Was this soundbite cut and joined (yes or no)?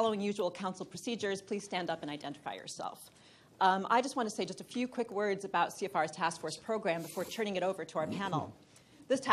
no